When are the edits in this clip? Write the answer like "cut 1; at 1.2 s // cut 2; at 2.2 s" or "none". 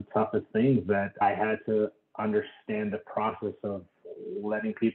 cut 1; at 1.2 s